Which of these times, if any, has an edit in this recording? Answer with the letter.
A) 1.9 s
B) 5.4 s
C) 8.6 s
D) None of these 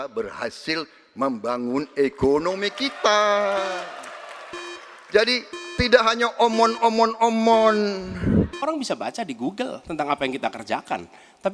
C